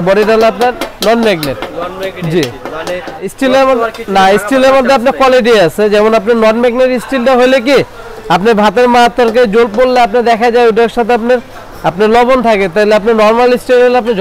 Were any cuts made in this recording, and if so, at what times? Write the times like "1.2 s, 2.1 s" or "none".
3.3 s